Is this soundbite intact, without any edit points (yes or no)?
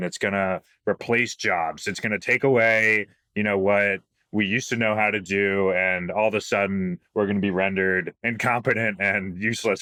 yes